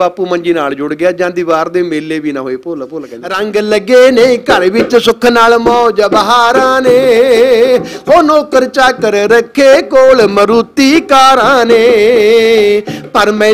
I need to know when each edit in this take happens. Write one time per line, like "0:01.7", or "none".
0:03.2